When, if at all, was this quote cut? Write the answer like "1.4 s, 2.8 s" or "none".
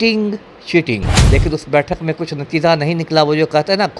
1.1 s